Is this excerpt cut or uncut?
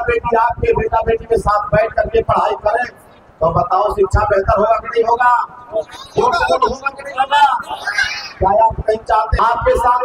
uncut